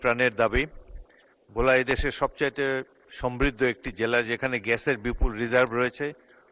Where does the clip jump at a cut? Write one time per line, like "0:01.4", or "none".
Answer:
none